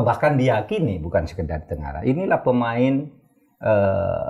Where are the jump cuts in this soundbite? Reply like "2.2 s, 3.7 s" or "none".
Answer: none